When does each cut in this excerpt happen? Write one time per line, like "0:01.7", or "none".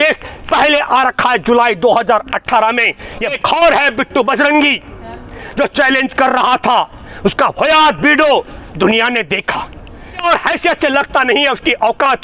0:03.3
0:10.3